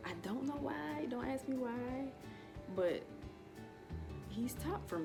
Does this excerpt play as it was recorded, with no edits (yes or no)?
yes